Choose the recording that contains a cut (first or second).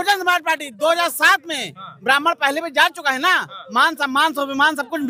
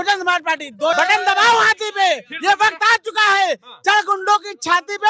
second